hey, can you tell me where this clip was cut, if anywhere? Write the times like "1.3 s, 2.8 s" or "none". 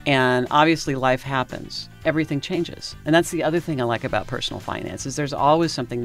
2.0 s